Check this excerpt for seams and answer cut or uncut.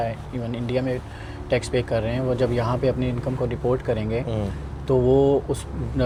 uncut